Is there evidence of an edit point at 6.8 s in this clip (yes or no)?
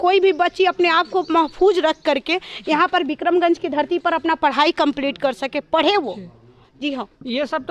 no